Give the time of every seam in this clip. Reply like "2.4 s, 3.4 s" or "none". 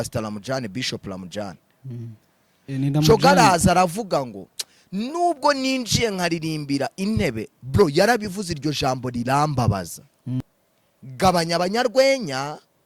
10.4 s